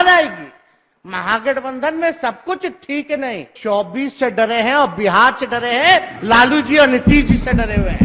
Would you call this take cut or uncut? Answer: cut